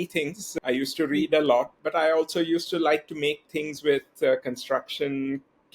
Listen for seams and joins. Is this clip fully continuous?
yes; 0 cuts

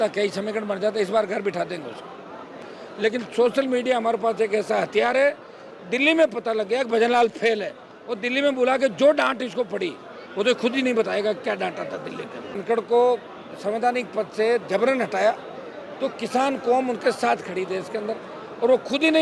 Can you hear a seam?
yes; 2 cuts; at 2.6 s, 12.6 s

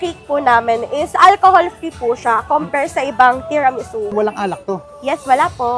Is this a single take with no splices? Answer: no; 1 cut; at 4.1 s

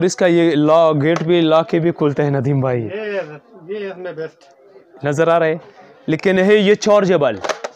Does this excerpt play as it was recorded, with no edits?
yes; 0 cuts

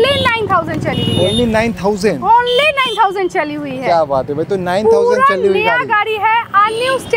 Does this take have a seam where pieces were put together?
no; 0 cuts

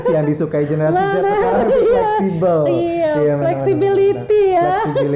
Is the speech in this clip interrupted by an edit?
no; 0 cuts

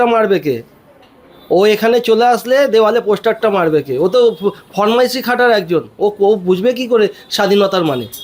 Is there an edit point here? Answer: no; 0 cuts

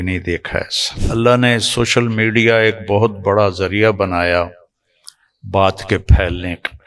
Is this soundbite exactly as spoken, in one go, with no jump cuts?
no; 1 cut; at 1.0 s

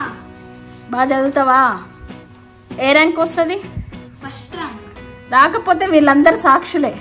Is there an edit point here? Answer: no; 0 cuts

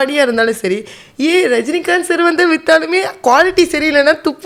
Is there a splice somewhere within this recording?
no; 0 cuts

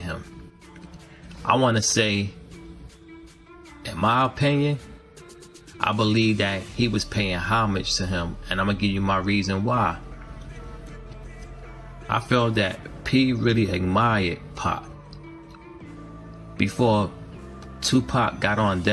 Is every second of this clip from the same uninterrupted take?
no; 2 cuts; at 14.8 s, 16.6 s

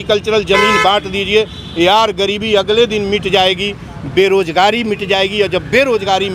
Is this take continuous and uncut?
yes; 0 cuts

